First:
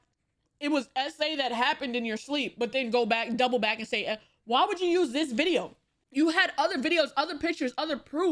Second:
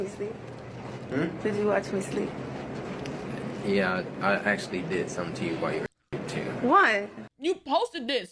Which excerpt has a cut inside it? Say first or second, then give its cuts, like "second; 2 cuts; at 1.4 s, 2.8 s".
second; 1 cut; at 7.3 s